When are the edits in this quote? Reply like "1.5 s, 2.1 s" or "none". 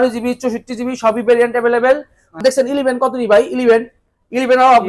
2.4 s